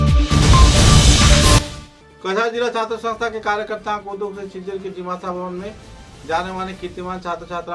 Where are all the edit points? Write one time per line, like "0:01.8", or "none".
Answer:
0:01.6